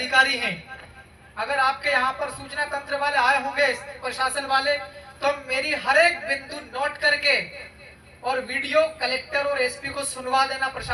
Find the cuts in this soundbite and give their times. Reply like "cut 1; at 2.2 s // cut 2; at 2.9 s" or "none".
none